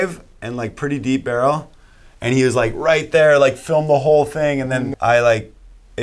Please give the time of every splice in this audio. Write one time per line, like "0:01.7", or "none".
0:04.9